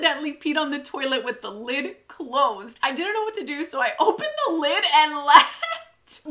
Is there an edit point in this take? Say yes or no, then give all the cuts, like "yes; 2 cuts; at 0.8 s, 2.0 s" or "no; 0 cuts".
no; 0 cuts